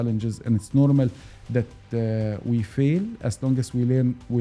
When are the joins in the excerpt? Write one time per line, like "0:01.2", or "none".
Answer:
none